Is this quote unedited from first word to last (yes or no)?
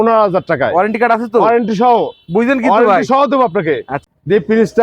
no